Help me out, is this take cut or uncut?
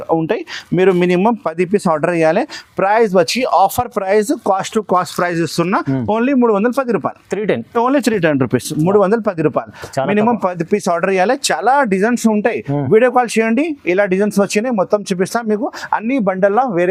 uncut